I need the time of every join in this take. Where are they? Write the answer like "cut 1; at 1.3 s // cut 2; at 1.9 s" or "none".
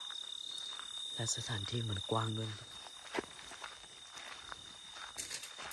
cut 1; at 2.6 s

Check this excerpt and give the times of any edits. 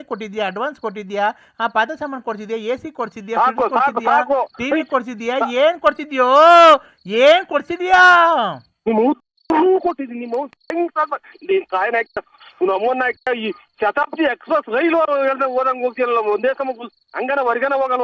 none

